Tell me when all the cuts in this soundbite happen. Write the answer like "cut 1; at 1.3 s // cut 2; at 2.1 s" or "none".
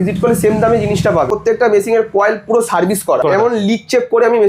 cut 1; at 1.3 s // cut 2; at 3.2 s